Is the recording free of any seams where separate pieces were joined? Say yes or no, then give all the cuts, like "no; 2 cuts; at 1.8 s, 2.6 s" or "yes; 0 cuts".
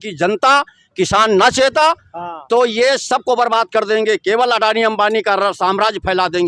yes; 0 cuts